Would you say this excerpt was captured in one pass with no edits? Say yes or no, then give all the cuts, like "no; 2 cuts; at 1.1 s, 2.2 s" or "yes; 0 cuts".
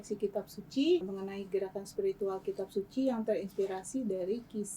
no; 1 cut; at 1.1 s